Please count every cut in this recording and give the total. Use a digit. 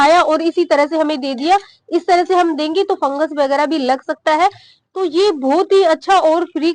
0